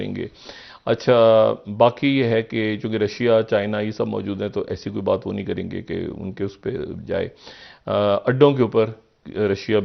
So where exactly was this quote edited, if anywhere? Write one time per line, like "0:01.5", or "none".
none